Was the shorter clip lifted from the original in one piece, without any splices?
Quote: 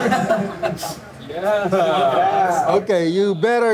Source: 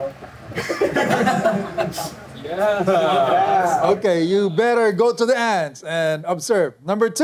yes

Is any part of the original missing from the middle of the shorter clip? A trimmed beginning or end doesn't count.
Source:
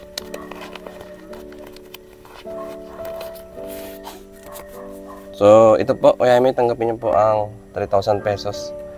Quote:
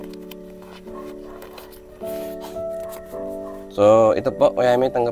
yes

